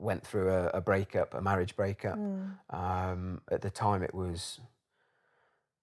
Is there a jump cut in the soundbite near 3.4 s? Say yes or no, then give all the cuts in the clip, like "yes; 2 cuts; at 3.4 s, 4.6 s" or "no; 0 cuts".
yes; 1 cut; at 3.4 s